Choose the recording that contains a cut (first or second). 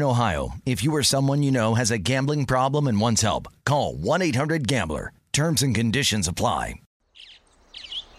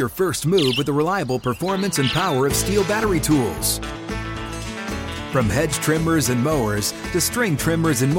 first